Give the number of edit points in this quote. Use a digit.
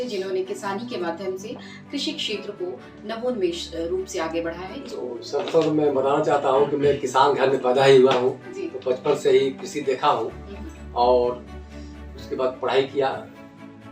1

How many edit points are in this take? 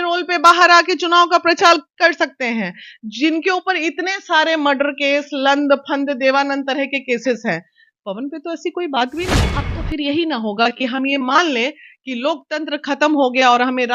1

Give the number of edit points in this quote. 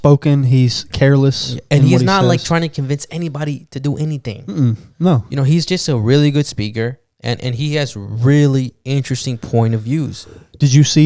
0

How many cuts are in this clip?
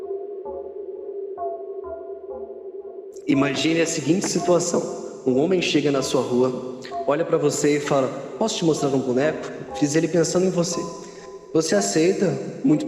1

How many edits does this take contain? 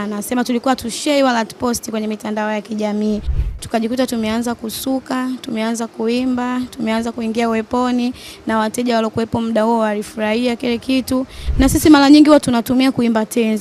2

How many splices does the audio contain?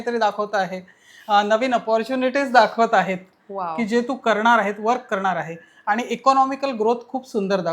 0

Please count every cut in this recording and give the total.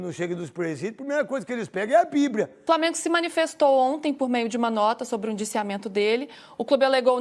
1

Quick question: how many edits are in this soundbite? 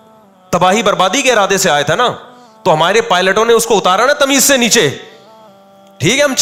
0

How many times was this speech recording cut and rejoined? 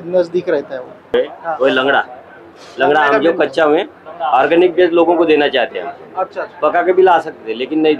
1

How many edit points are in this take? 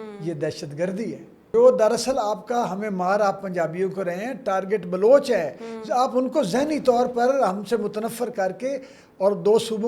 1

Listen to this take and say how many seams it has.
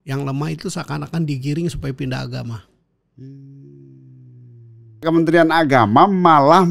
1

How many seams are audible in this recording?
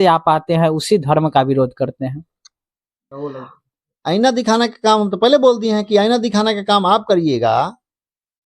1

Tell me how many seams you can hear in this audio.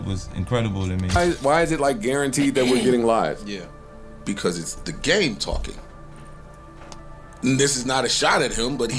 1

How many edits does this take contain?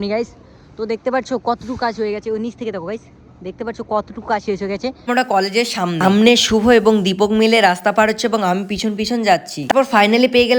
2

